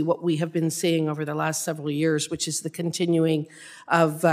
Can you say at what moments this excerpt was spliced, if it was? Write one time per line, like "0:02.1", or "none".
0:02.4